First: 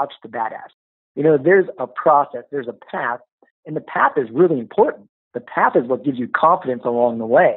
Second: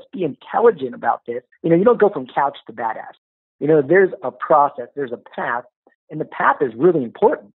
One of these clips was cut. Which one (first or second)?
second